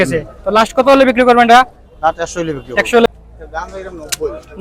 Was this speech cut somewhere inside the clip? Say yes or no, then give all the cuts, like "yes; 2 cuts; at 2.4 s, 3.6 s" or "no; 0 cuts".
yes; 1 cut; at 3.1 s